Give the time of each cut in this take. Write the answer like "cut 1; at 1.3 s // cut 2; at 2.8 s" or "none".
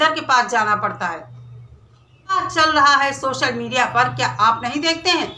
cut 1; at 2.4 s